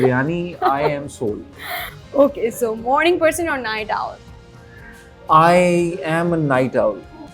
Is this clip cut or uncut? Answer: uncut